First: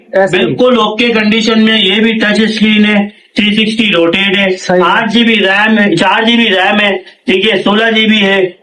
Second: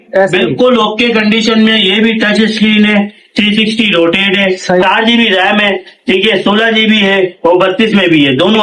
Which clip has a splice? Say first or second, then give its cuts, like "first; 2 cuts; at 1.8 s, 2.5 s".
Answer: second; 1 cut; at 4.8 s